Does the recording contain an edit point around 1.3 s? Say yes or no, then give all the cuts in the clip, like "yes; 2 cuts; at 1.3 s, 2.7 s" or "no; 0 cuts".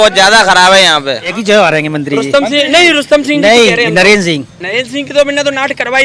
yes; 1 cut; at 1.3 s